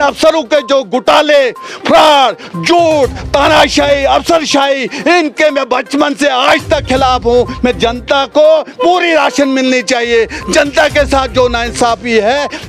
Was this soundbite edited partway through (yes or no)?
no